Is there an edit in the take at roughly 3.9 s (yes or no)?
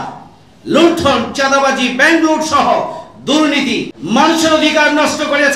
yes